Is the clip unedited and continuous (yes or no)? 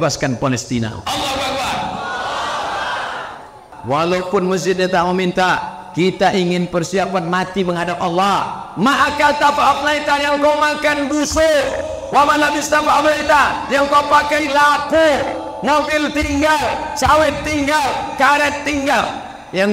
no